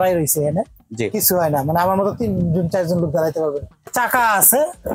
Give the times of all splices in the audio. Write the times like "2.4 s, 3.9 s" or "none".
3.9 s